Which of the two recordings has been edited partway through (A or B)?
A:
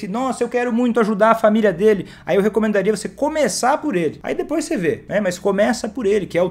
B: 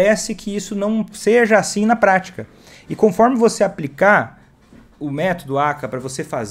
A